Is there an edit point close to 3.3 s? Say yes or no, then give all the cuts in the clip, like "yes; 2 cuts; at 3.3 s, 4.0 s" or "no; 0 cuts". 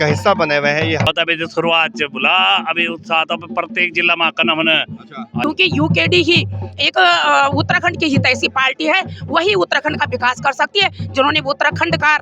no; 2 cuts; at 1.1 s, 5.4 s